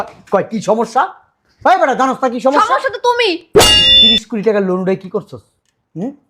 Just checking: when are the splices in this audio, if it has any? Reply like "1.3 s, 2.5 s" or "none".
3.9 s